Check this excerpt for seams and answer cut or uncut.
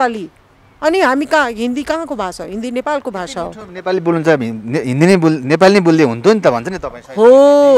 uncut